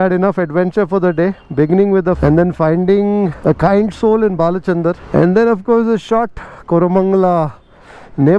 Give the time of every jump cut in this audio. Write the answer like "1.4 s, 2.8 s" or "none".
2.2 s, 3.4 s, 5.0 s